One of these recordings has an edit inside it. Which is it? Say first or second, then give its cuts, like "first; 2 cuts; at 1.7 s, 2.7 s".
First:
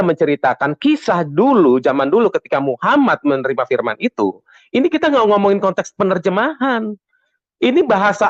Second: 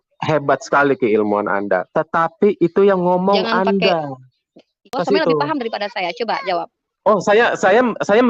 second; 1 cut; at 4.9 s